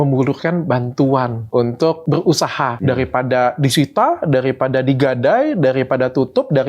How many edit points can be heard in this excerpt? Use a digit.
2